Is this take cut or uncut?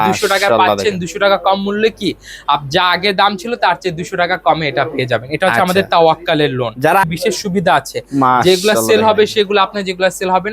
cut